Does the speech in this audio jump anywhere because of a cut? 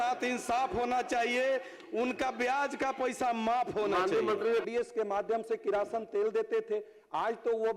yes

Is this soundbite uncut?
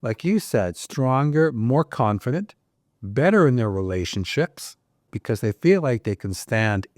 no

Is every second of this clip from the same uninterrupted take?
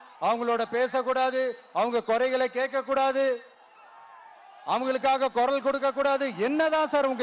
yes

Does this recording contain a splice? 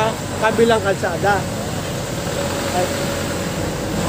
no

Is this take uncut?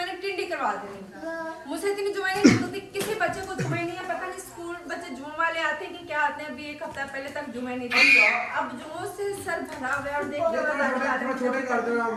yes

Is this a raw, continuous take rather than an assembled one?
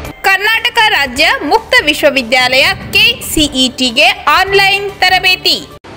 yes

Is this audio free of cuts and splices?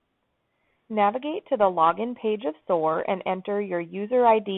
yes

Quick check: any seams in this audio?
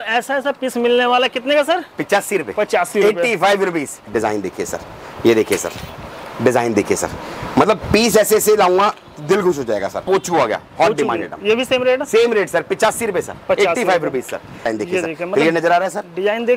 yes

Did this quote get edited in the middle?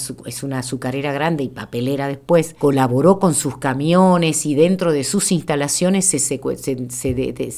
no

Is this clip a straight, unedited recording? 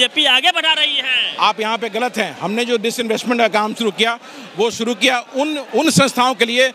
yes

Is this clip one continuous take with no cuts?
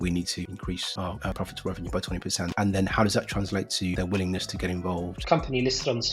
no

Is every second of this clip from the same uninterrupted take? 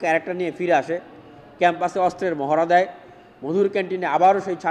yes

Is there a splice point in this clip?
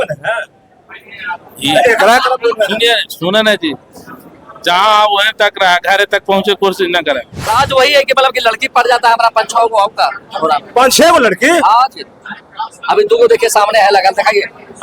yes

